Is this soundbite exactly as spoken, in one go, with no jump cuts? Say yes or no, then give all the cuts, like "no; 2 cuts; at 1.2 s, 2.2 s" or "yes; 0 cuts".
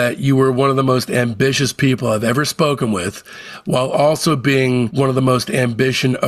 yes; 0 cuts